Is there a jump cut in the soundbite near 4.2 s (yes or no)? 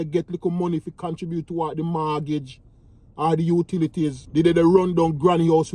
yes